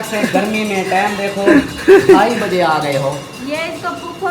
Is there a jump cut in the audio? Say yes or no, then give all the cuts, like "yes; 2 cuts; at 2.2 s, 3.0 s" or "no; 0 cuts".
no; 0 cuts